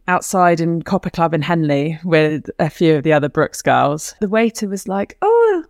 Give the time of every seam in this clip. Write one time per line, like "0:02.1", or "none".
0:04.2